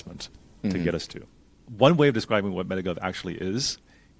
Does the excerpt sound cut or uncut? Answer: cut